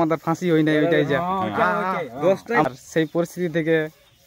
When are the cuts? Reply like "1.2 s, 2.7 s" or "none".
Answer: 2.7 s